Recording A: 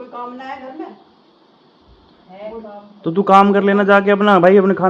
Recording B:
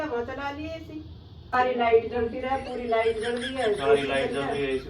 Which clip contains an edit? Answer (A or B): B